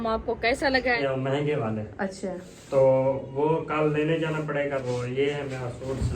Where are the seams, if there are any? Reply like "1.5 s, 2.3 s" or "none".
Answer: 1.0 s, 4.8 s